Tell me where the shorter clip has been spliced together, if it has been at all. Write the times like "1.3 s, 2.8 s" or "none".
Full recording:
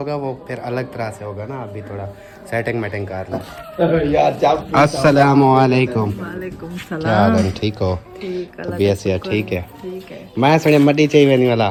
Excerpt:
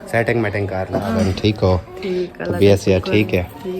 1.1 s

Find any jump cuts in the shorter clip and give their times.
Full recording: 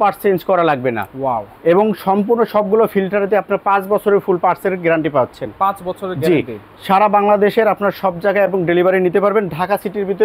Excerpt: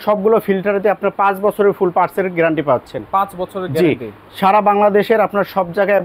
none

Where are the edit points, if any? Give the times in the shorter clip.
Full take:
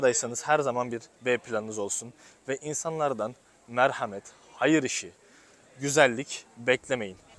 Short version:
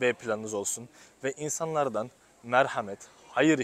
none

